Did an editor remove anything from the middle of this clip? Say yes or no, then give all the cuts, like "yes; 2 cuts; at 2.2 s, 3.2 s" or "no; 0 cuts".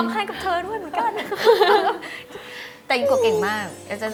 no; 0 cuts